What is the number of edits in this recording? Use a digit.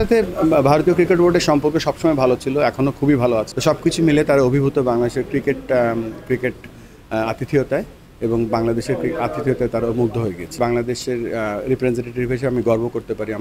2